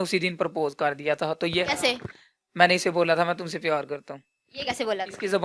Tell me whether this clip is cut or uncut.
uncut